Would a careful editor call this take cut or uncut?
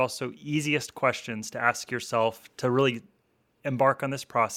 uncut